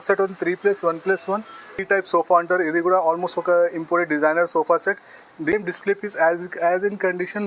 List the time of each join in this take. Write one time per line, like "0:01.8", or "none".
0:01.7
0:05.5

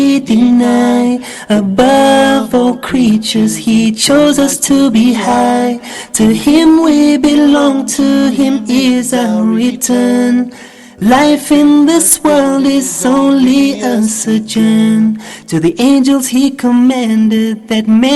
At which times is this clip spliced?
0:05.4

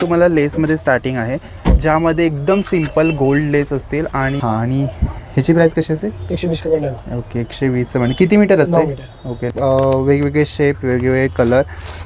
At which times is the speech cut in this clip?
0:04.4
0:09.5

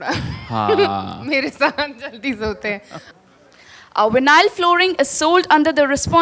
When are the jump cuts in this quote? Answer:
0:03.0

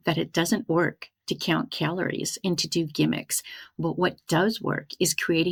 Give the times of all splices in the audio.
none

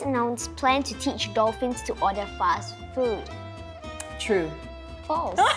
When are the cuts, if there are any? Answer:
none

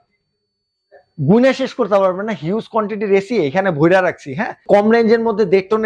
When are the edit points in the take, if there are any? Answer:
0:04.7

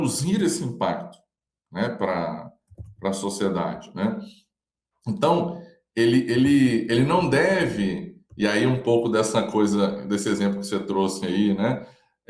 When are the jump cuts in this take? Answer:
none

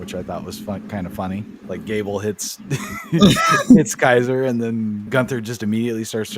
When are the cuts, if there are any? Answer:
0:01.6
0:05.0

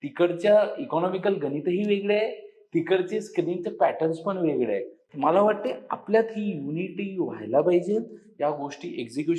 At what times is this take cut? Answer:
none

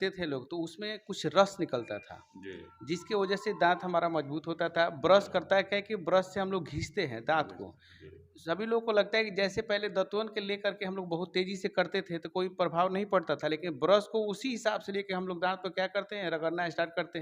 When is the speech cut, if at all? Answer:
none

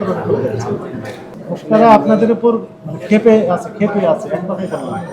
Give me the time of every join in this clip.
0:01.3

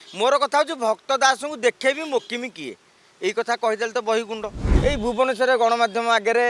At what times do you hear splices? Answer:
0:04.6

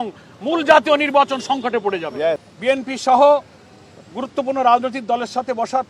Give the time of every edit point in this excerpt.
0:02.5

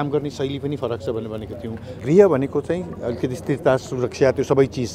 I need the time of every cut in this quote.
0:02.0

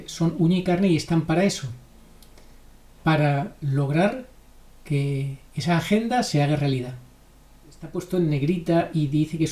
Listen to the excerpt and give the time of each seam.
0:08.0

